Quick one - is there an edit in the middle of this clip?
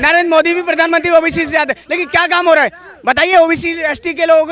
no; 0 cuts

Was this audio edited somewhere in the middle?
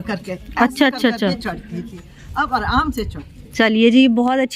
no; 0 cuts

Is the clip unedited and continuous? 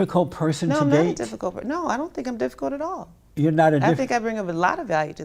yes; 0 cuts

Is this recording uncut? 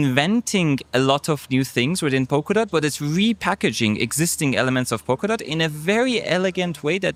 yes; 0 cuts

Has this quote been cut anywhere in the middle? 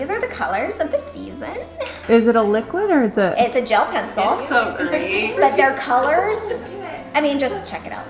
no; 0 cuts

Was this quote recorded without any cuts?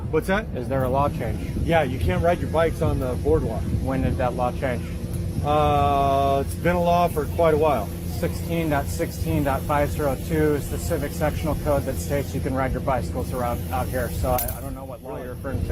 yes; 0 cuts

